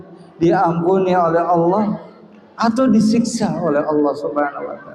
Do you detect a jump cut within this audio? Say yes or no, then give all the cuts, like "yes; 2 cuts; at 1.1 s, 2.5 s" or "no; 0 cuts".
no; 0 cuts